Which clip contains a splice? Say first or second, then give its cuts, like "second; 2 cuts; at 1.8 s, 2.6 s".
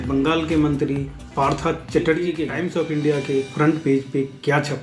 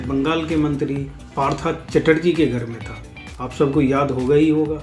first; 1 cut; at 2.5 s